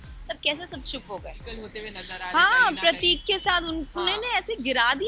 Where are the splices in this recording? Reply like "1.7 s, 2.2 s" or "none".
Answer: 1.4 s